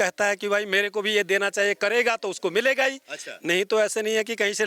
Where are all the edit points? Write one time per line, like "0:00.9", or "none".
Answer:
none